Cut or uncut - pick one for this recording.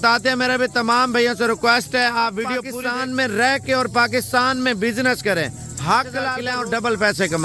cut